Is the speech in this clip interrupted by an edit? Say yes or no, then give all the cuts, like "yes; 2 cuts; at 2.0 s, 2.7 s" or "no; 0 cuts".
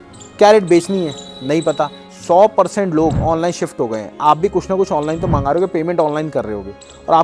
yes; 1 cut; at 2.0 s